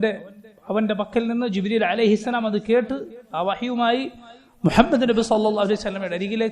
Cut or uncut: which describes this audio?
uncut